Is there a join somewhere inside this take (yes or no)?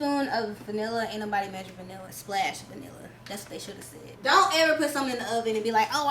yes